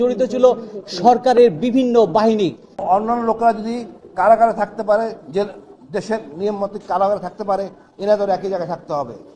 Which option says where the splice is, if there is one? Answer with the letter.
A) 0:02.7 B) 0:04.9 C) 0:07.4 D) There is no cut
A